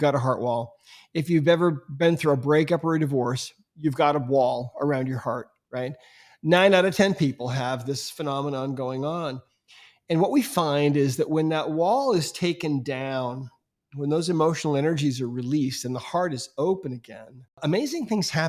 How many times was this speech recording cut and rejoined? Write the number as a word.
one